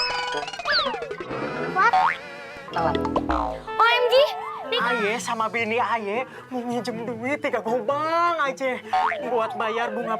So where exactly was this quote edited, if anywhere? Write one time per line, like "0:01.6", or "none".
0:04.6